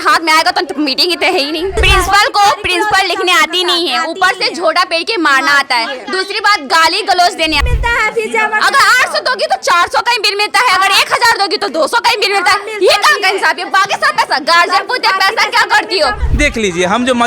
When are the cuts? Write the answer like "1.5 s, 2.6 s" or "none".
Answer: 1.8 s, 7.6 s, 16.2 s